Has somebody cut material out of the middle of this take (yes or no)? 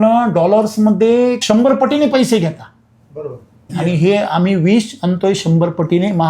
no